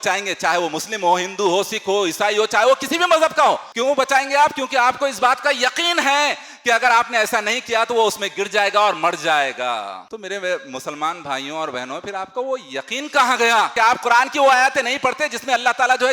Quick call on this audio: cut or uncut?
uncut